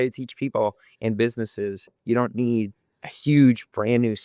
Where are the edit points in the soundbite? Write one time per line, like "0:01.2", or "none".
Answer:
0:01.9